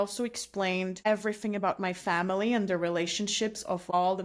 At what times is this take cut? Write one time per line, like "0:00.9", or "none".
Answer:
none